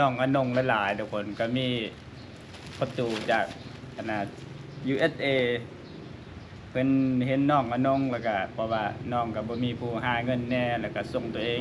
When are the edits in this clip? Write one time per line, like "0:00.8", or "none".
none

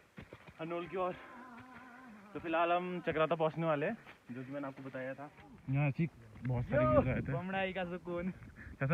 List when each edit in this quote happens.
0:05.5

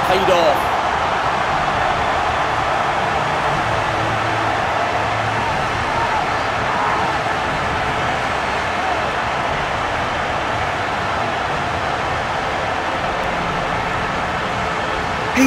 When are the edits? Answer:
none

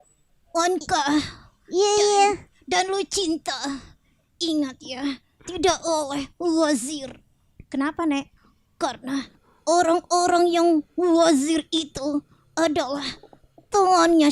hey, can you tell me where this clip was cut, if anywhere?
0:09.5

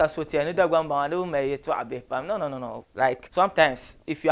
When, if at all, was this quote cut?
0:03.2

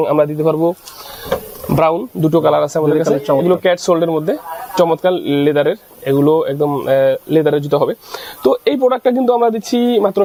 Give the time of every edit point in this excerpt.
none

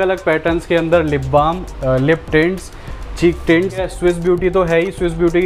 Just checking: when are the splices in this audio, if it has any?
0:03.9

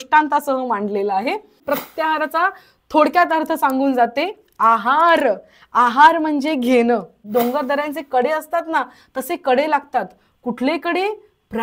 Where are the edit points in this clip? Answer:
0:01.6
0:07.2

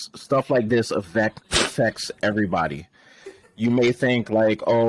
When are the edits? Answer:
none

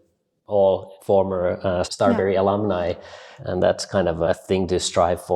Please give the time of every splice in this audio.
0:00.9
0:01.9
0:03.2
0:04.3

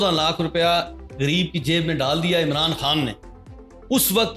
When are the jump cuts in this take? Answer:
none

